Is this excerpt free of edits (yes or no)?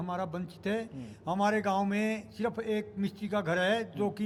yes